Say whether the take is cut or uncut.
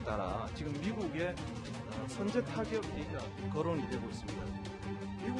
cut